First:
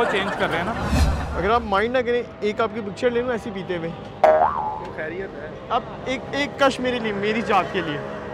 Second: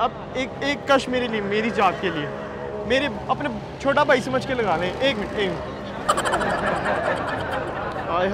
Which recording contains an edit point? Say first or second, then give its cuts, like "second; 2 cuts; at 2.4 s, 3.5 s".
first; 1 cut; at 1.2 s